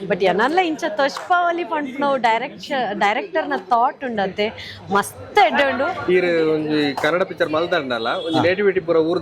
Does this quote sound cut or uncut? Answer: cut